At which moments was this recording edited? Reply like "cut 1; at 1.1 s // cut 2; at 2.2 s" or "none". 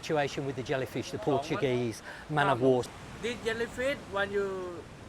cut 1; at 2.9 s

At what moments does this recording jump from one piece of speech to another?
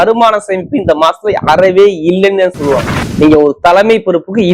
cut 1; at 3.0 s

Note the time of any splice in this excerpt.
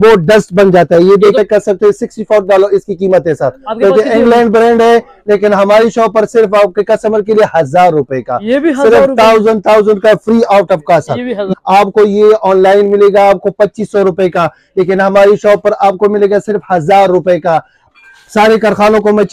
cut 1; at 1.3 s // cut 2; at 11.5 s // cut 3; at 17.8 s

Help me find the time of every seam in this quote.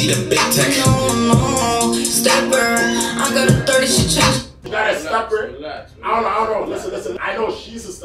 cut 1; at 4.6 s // cut 2; at 7.2 s

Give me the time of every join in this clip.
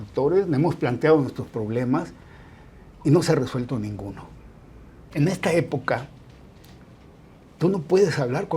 cut 1; at 5.0 s

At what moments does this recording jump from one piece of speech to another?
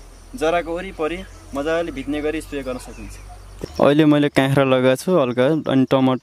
cut 1; at 3.6 s

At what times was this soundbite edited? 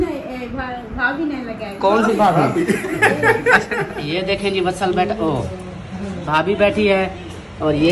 cut 1; at 4.0 s

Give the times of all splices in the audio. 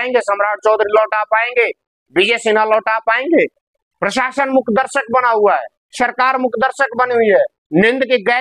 cut 1; at 3.6 s

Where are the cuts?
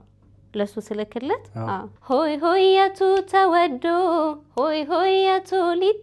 cut 1; at 1.9 s

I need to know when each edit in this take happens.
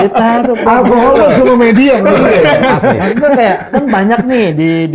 none

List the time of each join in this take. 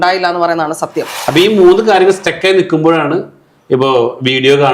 cut 1; at 1.1 s

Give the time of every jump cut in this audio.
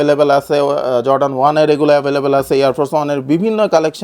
none

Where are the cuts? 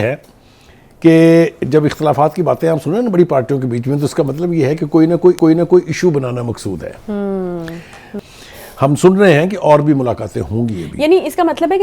cut 1; at 8.1 s

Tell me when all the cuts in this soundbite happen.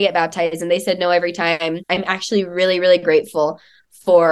cut 1; at 1.9 s

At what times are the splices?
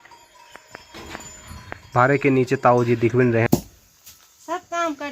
cut 1; at 3.5 s

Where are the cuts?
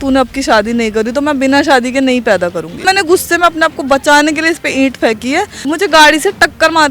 cut 1; at 2.8 s // cut 2; at 5.6 s

